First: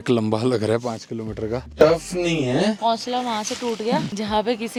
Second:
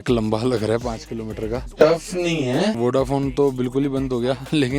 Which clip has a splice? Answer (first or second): second